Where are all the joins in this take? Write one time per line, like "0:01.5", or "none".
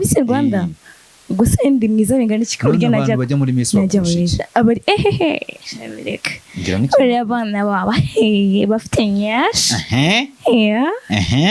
none